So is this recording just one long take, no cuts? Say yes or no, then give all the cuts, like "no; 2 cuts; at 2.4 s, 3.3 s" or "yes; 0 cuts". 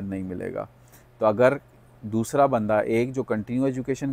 yes; 0 cuts